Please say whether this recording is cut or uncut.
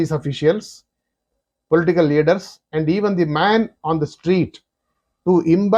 uncut